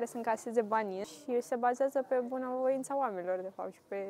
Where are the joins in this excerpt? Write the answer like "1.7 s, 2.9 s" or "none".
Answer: 1.0 s

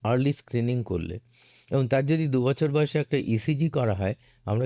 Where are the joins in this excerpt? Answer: none

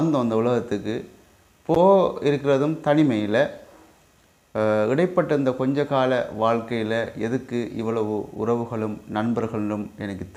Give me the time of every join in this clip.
none

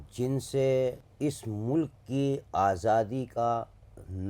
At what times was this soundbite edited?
1.1 s

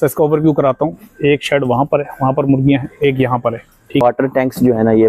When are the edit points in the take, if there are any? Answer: 4.0 s

